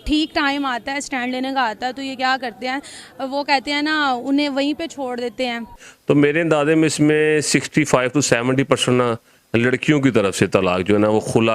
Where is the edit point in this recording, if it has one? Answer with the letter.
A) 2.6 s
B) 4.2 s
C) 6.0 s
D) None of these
C